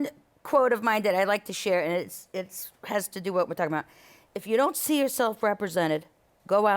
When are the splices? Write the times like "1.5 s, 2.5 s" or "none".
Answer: none